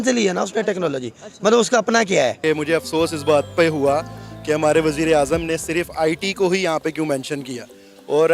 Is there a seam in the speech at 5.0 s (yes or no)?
no